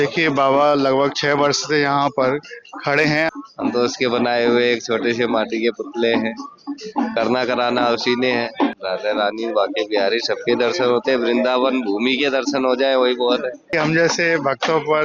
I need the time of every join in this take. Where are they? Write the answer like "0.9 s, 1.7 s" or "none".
3.3 s, 8.8 s, 13.7 s